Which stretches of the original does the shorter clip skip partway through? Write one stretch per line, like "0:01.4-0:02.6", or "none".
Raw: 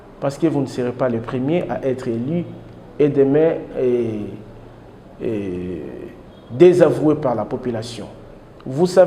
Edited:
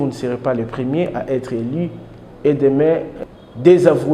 0:03.7-0:06.1